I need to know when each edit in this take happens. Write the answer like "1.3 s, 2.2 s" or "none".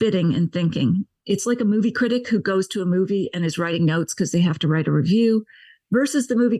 none